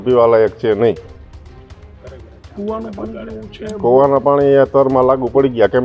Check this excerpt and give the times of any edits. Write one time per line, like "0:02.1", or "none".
none